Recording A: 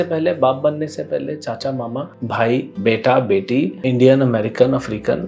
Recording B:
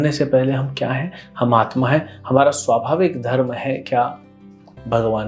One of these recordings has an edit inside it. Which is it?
A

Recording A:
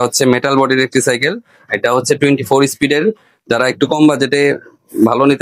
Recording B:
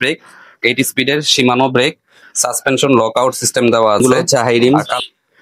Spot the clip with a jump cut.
B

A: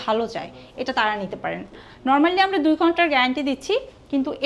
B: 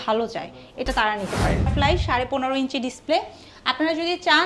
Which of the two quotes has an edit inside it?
B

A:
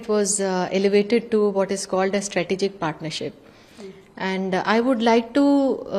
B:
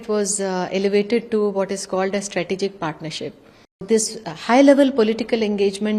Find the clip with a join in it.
B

